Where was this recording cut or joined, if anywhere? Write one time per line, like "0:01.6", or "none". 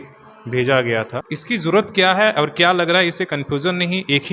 0:01.3

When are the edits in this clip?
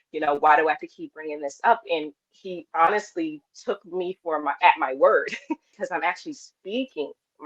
0:05.7

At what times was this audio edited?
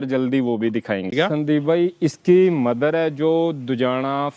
0:01.1

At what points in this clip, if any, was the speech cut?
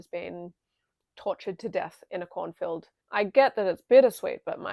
0:02.9

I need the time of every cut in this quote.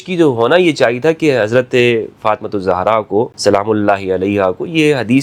0:03.3

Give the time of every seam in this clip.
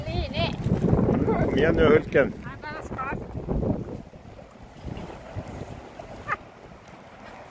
0:06.2

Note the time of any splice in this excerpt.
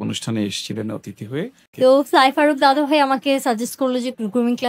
0:01.6

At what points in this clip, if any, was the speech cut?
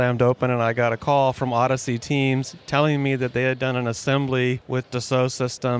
0:01.0
0:02.6
0:04.6

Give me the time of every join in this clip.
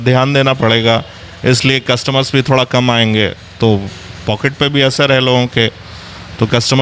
none

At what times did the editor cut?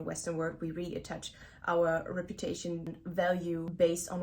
0:03.1

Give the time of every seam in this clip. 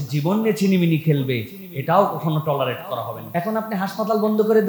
0:03.2

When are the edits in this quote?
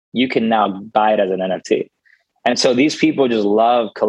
none

